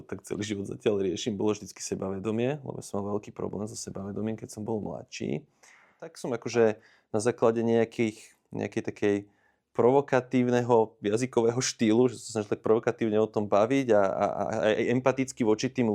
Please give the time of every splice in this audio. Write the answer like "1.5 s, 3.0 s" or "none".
6.2 s